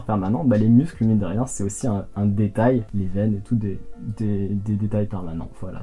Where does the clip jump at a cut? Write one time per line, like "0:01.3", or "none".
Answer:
none